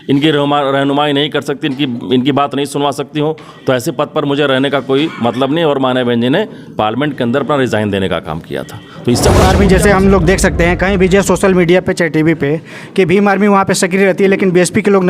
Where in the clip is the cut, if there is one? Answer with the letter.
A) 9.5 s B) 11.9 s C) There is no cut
A